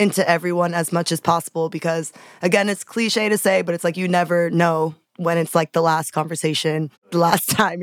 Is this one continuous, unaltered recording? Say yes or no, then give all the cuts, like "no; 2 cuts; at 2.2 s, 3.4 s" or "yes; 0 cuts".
no; 2 cuts; at 5.0 s, 7.1 s